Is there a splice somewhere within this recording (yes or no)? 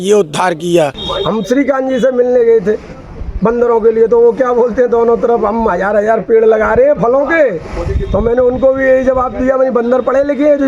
yes